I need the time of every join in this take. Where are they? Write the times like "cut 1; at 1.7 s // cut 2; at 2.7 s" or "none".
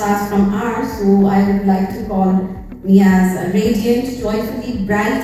none